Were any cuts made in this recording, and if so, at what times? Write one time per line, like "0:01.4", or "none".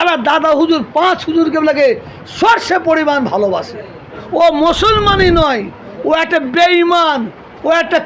0:04.2

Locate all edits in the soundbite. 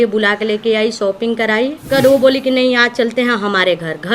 0:01.9

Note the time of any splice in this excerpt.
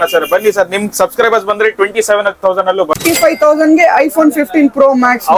0:03.0

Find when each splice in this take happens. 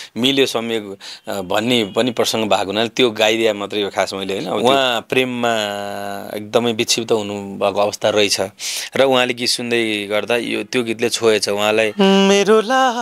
0:04.6
0:11.9

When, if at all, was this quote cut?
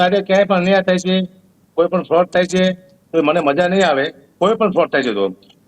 none

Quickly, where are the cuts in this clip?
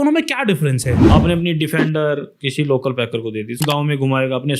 0:00.9
0:02.4
0:03.6

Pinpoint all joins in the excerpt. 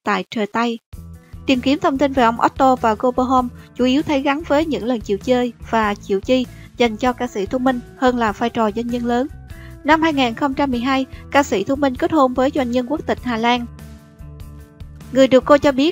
none

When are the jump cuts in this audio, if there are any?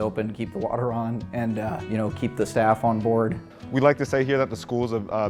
0:01.8
0:03.4

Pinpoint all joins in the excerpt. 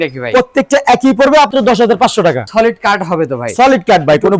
0:01.5
0:02.4

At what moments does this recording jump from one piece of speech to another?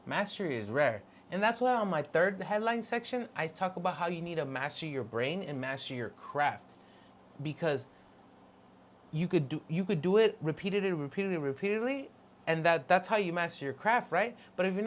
none

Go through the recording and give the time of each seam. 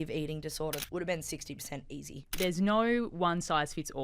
0:00.8
0:02.3

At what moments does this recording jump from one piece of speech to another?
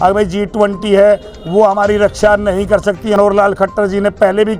0:03.2

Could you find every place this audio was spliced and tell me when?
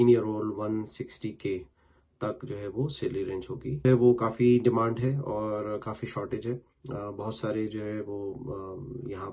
0:03.8

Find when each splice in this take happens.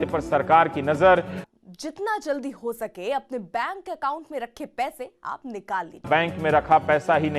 0:01.4
0:06.0

